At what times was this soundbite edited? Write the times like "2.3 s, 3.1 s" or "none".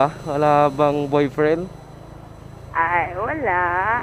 none